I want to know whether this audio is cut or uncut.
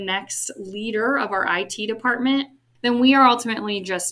cut